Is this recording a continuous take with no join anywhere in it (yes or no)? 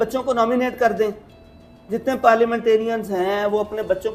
yes